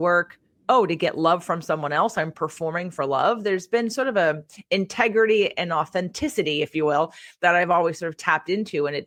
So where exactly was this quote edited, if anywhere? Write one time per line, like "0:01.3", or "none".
none

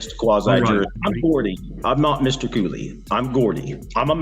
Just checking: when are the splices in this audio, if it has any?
0:00.9

